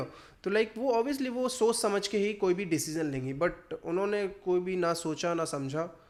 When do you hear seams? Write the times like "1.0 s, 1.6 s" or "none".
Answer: none